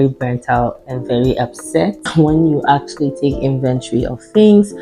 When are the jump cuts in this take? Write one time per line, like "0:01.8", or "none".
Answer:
0:02.1